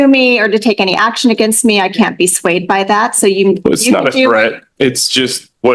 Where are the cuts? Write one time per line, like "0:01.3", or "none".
none